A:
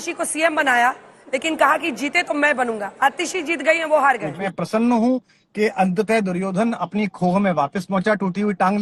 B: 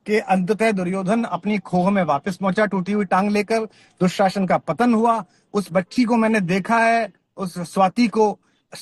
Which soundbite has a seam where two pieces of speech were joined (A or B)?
A